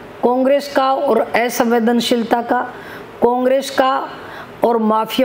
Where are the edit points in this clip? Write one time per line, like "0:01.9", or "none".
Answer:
none